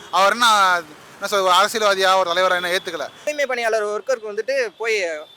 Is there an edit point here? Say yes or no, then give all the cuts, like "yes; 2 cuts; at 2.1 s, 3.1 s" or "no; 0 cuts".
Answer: yes; 1 cut; at 3.2 s